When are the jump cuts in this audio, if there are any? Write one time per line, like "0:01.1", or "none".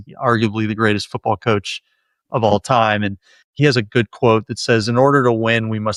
none

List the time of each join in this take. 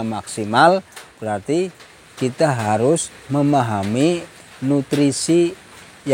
none

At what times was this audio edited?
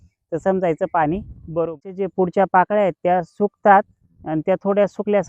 0:01.8

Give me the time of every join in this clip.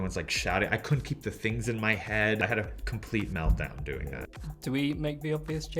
0:02.4

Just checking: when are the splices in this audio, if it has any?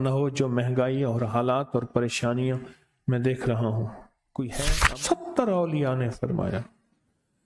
0:04.6

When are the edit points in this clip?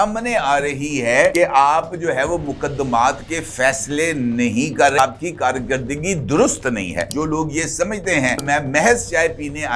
0:01.3
0:05.0
0:07.1
0:08.4

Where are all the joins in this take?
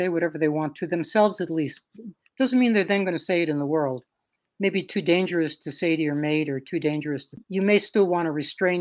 0:07.4

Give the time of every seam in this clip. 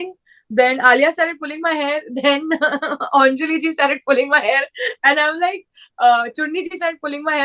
none

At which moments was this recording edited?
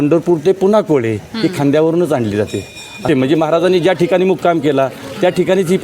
0:03.0

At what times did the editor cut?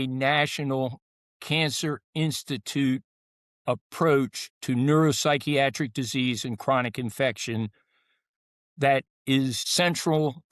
none

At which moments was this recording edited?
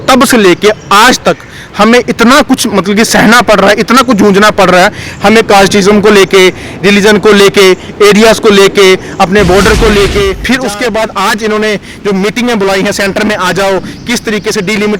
0:10.4

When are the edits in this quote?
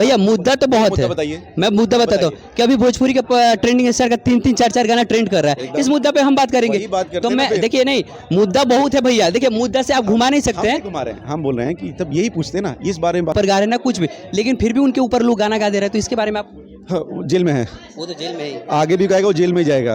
0:13.3

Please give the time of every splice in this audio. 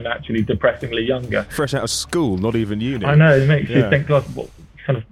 0:01.5

